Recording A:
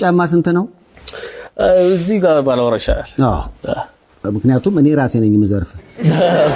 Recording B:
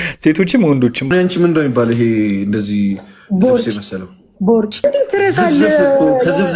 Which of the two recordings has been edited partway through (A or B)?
B